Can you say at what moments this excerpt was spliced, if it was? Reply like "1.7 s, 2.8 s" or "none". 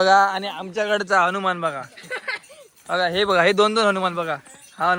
none